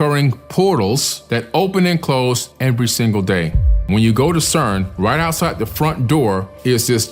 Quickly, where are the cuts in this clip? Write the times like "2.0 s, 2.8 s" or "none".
1.1 s, 3.9 s

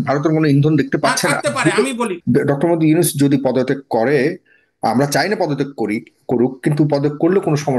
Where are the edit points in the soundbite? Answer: 2.1 s

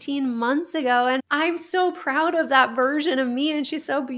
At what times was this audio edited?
1.2 s

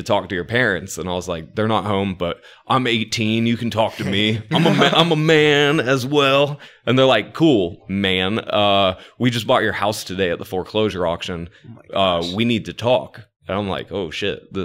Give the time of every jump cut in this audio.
13.3 s

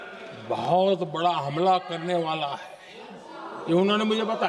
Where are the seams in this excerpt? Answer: none

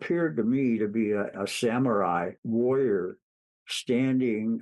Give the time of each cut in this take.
1.3 s, 2.4 s

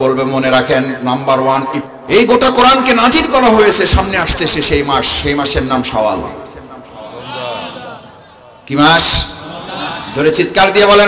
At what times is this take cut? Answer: 1.8 s

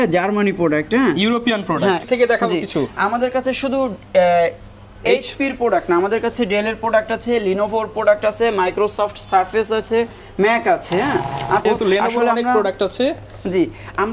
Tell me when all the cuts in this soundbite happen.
2.0 s, 11.6 s

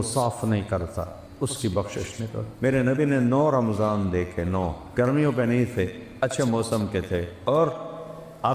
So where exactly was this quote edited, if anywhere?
2.4 s, 4.8 s, 7.3 s

